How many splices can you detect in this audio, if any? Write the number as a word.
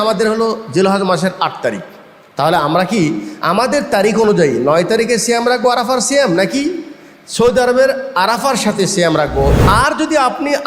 one